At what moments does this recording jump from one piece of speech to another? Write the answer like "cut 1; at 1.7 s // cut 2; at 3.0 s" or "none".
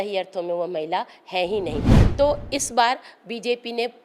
cut 1; at 1.9 s